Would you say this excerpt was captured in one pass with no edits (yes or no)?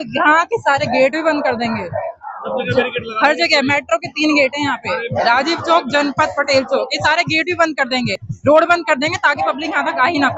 yes